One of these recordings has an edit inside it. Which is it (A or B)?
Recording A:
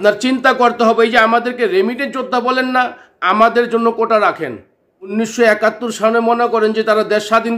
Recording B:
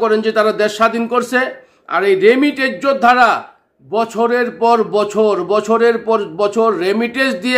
A